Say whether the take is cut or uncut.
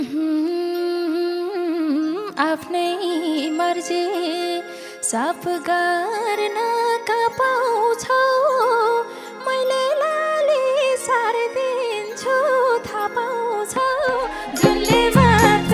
uncut